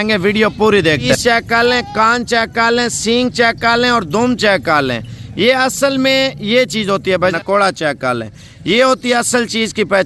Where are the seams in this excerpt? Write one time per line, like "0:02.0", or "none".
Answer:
0:01.1
0:07.3